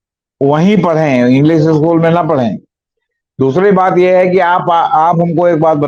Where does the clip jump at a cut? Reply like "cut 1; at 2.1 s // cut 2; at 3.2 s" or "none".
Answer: none

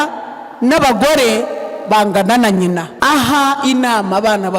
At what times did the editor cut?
cut 1; at 2.9 s

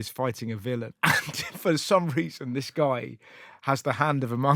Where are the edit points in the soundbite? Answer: cut 1; at 0.9 s

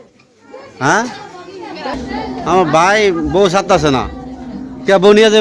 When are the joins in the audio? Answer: cut 1; at 2.0 s

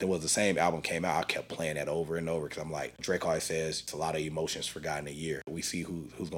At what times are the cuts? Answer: cut 1; at 3.0 s // cut 2; at 3.9 s // cut 3; at 5.5 s

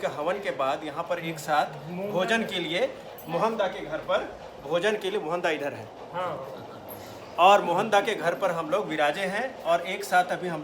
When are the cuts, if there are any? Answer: none

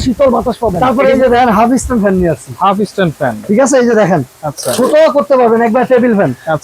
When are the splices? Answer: cut 1; at 1.0 s

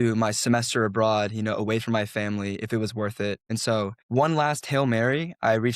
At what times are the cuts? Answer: cut 1; at 3.6 s

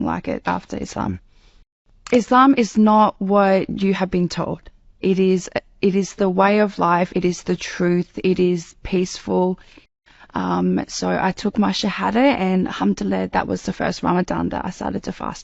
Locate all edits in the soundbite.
cut 1; at 1.8 s // cut 2; at 9.9 s

